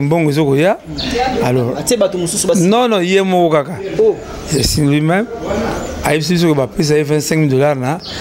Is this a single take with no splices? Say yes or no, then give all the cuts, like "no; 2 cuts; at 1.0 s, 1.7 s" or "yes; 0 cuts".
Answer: yes; 0 cuts